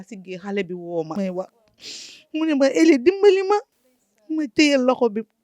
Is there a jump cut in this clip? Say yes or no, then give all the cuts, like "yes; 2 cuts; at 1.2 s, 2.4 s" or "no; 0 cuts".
yes; 1 cut; at 1.2 s